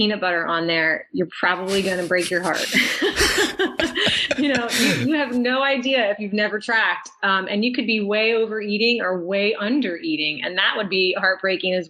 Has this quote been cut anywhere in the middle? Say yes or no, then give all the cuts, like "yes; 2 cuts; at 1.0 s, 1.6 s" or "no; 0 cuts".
no; 0 cuts